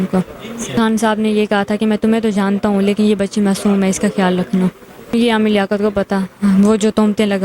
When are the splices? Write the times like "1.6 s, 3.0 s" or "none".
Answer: 0.7 s, 5.1 s

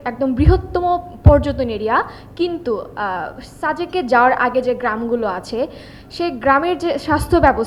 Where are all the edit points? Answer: none

